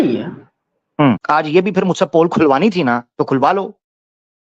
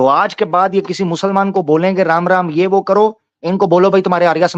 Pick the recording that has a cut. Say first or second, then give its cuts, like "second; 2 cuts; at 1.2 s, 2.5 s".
first; 1 cut; at 1.2 s